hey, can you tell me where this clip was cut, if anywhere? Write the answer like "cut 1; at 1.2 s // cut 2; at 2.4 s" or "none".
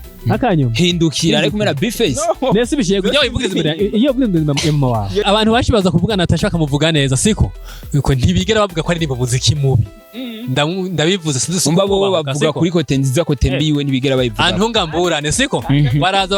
cut 1; at 5.2 s